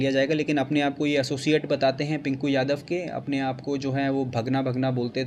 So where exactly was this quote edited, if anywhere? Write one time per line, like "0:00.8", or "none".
none